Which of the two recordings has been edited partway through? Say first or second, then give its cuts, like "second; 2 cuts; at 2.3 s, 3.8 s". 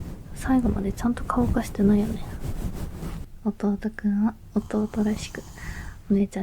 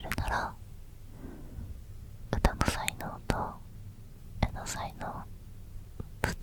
first; 1 cut; at 3.2 s